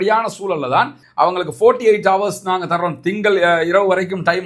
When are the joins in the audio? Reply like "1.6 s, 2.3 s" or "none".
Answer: 1.0 s